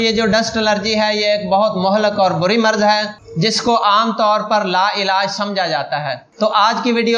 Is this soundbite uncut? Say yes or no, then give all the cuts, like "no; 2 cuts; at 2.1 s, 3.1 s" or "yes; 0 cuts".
yes; 0 cuts